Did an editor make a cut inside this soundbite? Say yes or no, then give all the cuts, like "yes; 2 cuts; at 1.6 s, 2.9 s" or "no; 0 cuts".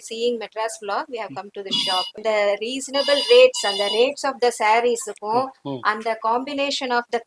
yes; 1 cut; at 2.2 s